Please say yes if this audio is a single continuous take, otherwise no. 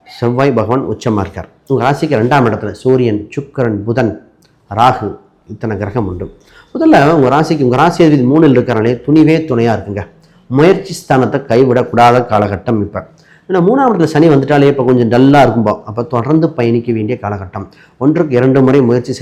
yes